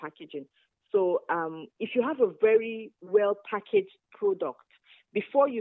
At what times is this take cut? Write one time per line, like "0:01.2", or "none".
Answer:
none